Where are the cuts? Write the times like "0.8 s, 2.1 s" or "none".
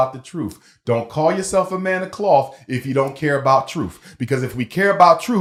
none